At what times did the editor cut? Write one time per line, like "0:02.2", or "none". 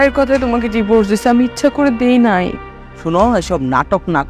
none